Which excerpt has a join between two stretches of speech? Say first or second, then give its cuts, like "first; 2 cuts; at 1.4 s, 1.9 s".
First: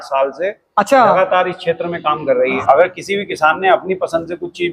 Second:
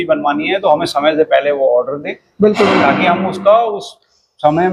first; 1 cut; at 2.6 s